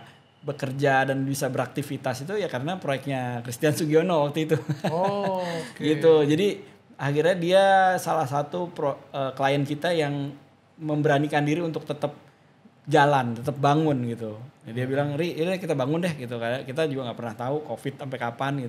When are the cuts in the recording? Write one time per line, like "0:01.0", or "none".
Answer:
none